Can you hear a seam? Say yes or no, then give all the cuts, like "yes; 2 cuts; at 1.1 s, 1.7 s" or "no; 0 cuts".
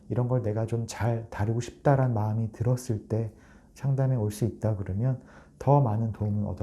no; 0 cuts